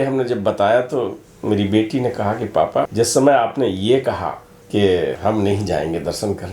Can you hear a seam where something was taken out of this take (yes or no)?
yes